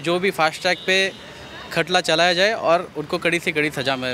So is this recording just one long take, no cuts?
yes; 0 cuts

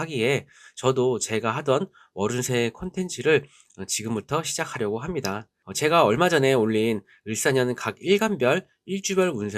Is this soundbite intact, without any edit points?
no; 1 cut; at 5.6 s

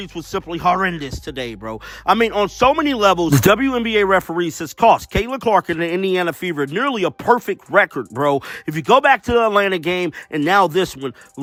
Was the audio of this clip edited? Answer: no; 0 cuts

